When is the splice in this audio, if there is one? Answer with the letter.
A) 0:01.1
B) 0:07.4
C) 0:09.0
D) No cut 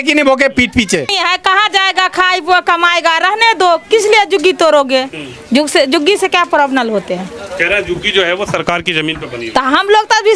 A